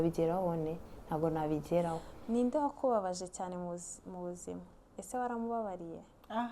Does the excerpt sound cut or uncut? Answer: cut